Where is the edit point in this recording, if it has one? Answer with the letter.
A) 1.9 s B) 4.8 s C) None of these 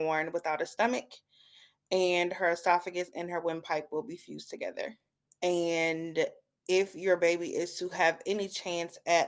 C